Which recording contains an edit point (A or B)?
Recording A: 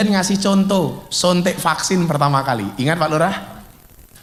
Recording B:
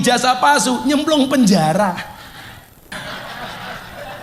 B